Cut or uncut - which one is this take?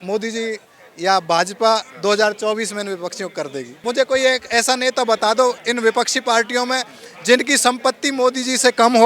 cut